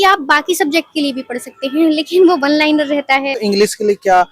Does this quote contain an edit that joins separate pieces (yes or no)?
yes